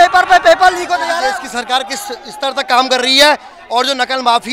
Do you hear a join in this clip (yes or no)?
yes